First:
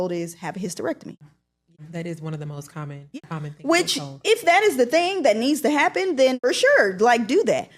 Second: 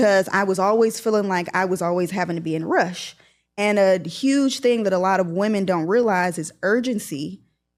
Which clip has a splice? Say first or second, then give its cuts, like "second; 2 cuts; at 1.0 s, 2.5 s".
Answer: first; 3 cuts; at 1.9 s, 3.2 s, 6.4 s